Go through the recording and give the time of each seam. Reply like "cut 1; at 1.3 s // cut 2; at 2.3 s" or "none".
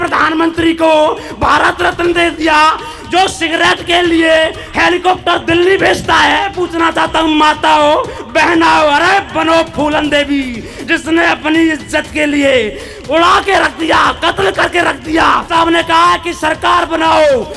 cut 1; at 6.5 s // cut 2; at 15.5 s